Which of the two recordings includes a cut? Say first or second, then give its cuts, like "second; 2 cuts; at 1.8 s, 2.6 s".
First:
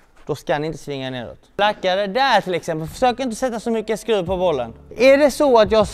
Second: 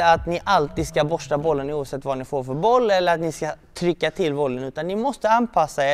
first; 2 cuts; at 1.5 s, 4.8 s